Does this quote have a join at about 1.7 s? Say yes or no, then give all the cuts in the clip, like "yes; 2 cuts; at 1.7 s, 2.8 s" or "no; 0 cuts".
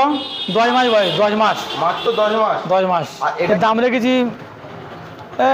no; 1 cut; at 3.5 s